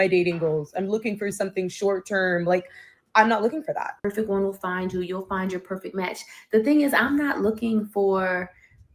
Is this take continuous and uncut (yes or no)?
no